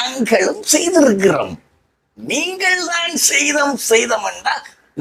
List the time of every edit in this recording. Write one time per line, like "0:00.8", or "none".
none